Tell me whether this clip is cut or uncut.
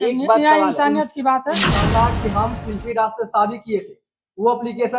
cut